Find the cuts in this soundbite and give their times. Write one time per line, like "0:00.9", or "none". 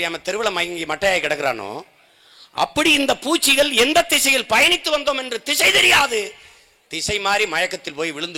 none